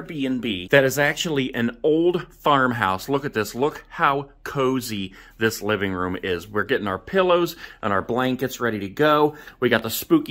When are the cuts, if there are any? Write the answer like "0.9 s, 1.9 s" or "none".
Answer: none